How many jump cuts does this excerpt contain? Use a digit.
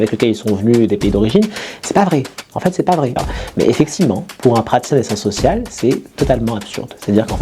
1